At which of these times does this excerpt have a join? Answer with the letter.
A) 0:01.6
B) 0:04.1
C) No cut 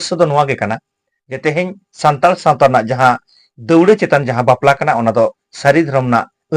C